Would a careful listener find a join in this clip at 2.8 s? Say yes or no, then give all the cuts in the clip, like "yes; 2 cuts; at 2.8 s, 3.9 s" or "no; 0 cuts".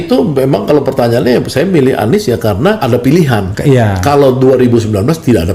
yes; 2 cuts; at 2.8 s, 3.5 s